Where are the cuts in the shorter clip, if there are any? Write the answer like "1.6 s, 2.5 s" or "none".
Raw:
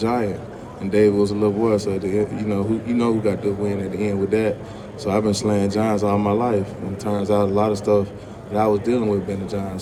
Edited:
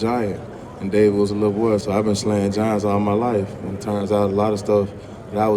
1.8 s